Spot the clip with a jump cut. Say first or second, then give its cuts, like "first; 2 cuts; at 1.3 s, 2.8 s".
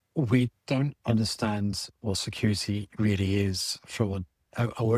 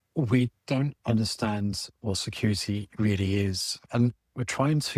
second; 1 cut; at 3.8 s